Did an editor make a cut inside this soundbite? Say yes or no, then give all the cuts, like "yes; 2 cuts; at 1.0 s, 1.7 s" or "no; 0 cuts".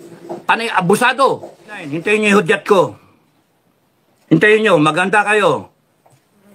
yes; 1 cut; at 1.9 s